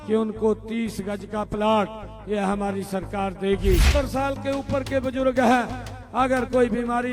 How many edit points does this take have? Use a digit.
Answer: 1